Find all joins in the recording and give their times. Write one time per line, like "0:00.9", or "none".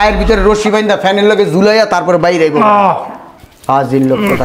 none